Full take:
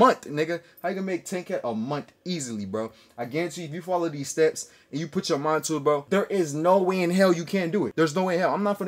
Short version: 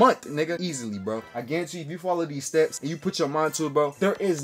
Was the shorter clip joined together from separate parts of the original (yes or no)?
yes